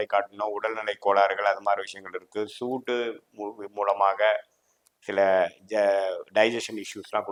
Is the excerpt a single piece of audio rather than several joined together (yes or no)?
yes